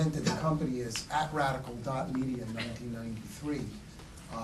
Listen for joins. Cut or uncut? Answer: cut